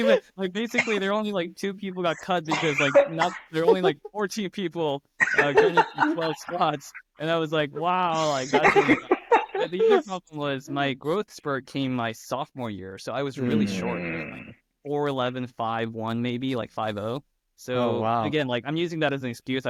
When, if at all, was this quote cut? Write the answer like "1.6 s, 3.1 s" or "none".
none